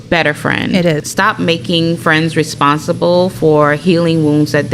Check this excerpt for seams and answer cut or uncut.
cut